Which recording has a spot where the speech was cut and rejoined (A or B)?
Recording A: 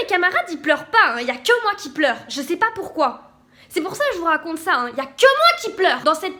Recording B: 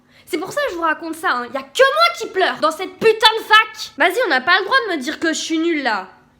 B